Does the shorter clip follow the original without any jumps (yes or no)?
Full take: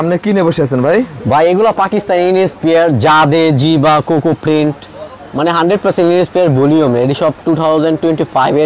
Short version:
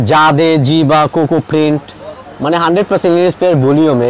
yes